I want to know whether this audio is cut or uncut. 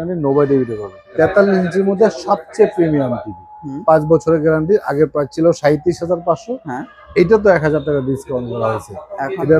cut